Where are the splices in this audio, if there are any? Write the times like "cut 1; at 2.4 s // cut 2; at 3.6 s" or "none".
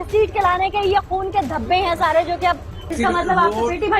cut 1; at 2.9 s